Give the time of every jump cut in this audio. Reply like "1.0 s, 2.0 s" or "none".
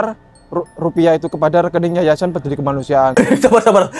none